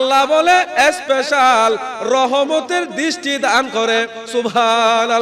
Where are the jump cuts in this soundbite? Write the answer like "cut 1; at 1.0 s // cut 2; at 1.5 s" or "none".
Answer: none

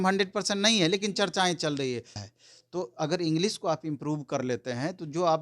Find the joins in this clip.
cut 1; at 2.2 s

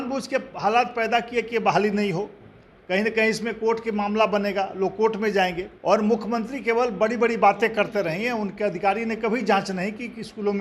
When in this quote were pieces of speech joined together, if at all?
cut 1; at 5.7 s

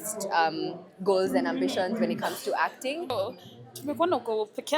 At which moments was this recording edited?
cut 1; at 3.1 s

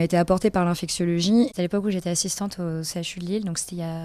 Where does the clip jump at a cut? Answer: none

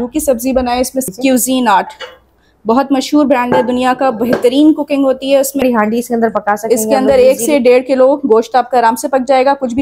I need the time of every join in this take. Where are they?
cut 1; at 1.1 s // cut 2; at 5.6 s

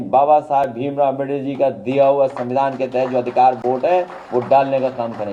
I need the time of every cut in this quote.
none

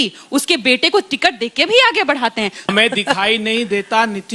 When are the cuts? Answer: cut 1; at 2.6 s

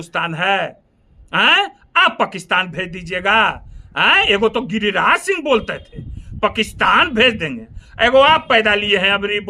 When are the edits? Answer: none

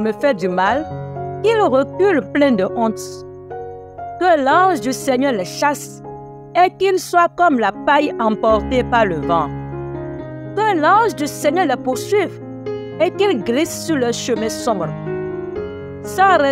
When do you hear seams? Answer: none

